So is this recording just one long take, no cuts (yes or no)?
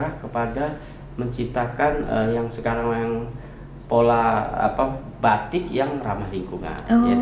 yes